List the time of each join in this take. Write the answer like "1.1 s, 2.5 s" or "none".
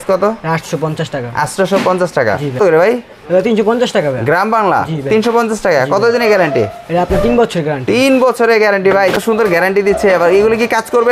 2.6 s, 9.6 s